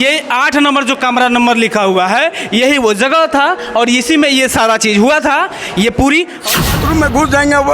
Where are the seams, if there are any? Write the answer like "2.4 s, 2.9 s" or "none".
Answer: 6.6 s